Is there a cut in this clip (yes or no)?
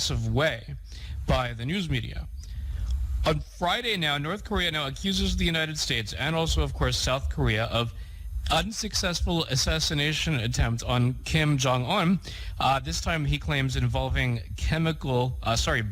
yes